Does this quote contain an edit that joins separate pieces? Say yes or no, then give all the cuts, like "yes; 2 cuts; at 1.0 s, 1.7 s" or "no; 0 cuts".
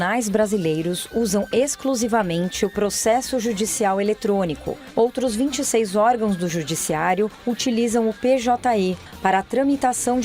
yes; 1 cut; at 9.1 s